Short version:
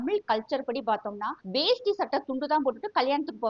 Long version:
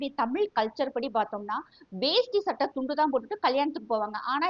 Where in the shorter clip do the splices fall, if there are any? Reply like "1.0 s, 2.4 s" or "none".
1.3 s